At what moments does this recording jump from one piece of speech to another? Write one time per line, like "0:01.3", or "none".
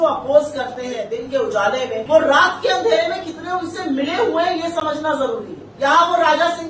0:01.0
0:02.0
0:05.6